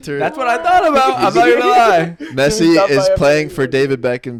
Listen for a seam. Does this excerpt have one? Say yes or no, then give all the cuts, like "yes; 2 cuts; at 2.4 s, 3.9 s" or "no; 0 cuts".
no; 0 cuts